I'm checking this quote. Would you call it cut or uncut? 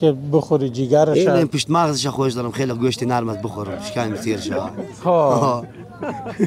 uncut